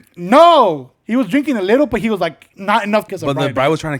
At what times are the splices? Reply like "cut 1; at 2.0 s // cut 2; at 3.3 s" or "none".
cut 1; at 3.1 s